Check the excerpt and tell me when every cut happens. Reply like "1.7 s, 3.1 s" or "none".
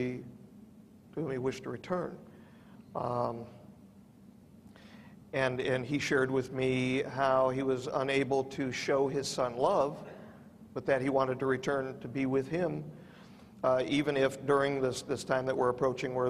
13.9 s